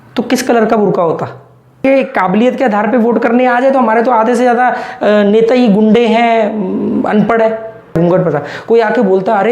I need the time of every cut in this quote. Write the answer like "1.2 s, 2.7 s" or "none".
1.8 s, 8.0 s